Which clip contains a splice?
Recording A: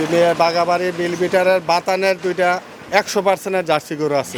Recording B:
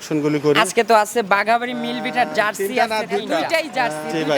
B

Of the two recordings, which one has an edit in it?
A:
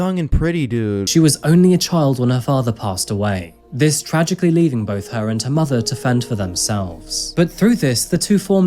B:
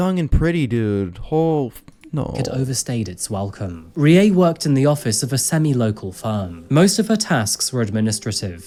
A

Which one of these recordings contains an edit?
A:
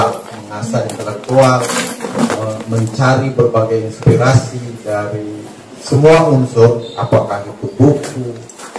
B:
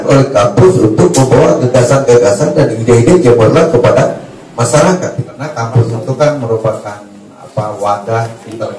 B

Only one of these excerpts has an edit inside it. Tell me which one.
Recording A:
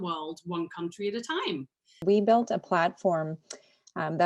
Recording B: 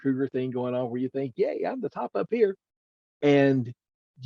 A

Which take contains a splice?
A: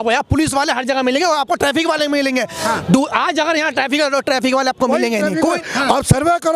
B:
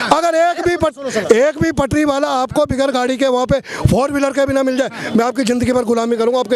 A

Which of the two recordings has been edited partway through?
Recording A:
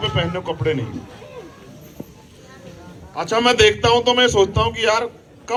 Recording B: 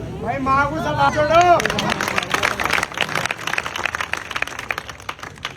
B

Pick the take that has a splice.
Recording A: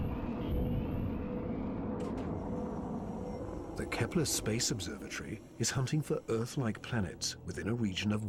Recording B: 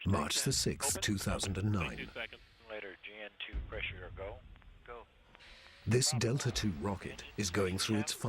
B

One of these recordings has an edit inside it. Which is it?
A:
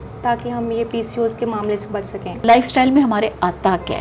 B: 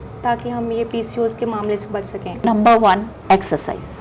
B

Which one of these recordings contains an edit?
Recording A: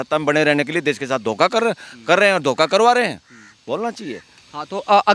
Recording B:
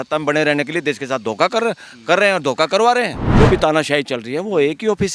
B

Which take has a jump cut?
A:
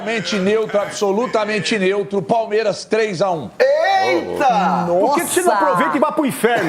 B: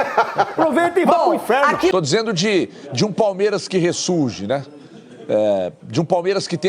B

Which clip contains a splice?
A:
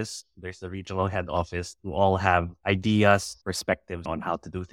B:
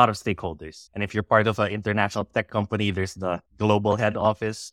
A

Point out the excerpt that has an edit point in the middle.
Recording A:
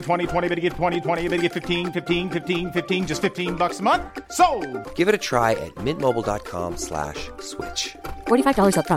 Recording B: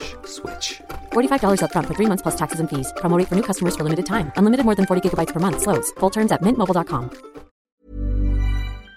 B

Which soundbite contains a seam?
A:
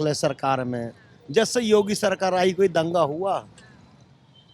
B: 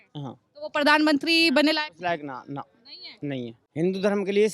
B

